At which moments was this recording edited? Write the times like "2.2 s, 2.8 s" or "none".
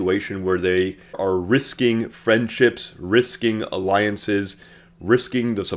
1.2 s